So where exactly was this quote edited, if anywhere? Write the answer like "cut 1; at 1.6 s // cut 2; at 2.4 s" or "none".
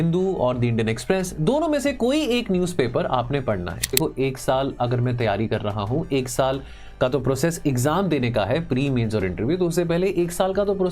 cut 1; at 4.0 s